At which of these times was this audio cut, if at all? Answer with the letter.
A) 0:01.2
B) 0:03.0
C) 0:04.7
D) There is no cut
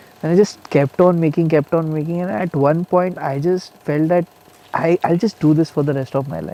D